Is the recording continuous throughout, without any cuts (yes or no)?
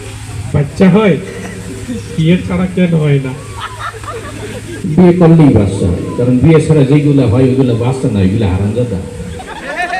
yes